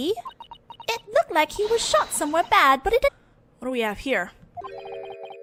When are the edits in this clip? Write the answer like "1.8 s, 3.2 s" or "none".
none